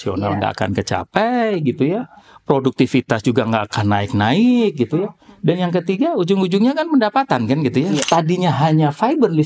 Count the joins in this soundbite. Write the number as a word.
one